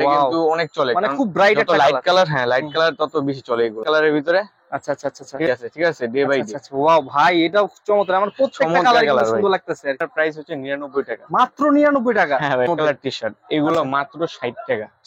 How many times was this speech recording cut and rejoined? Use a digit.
4